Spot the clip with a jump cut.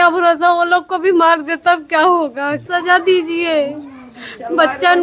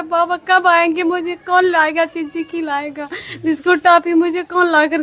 first; 1 cut; at 2.7 s

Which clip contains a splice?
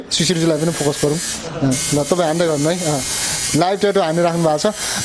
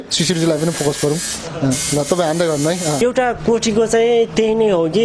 second; 1 cut; at 3.0 s

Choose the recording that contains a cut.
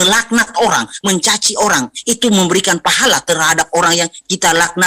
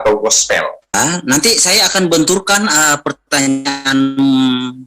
second; 1 cut; at 0.9 s

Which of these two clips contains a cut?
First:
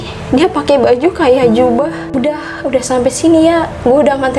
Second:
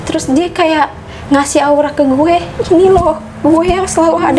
first; 1 cut; at 2.0 s

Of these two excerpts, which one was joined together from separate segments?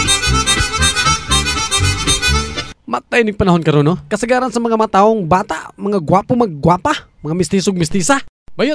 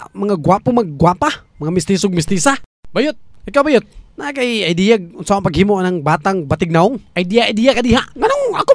first; 1 cut; at 2.6 s

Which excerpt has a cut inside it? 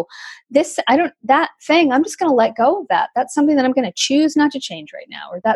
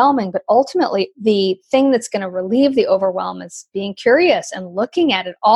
second; 1 cut; at 1.1 s

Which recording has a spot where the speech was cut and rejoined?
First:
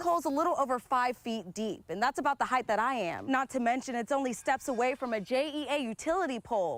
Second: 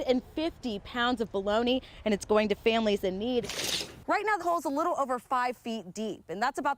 second; 1 cut; at 3.5 s

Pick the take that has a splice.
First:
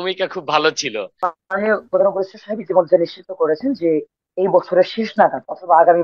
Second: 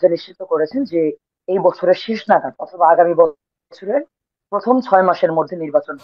first; 1 cut; at 1.1 s

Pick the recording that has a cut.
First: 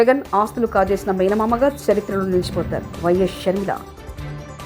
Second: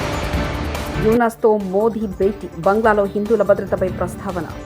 second; 1 cut; at 0.9 s

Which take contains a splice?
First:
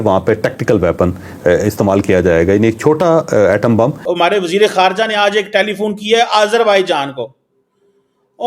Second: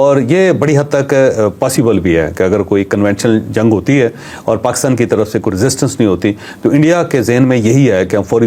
first; 1 cut; at 4.0 s

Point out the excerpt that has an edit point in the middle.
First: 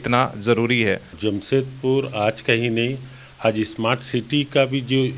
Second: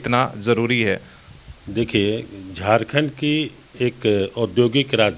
first; 1 cut; at 1.1 s

